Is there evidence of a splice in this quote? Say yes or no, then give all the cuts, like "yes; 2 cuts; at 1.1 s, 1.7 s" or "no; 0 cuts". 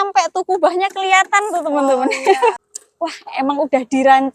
yes; 1 cut; at 2.6 s